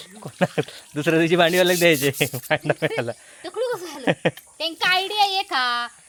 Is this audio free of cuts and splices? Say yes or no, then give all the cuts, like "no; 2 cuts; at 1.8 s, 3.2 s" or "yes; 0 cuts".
yes; 0 cuts